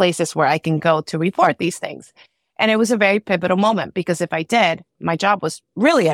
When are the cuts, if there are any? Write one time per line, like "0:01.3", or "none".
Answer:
none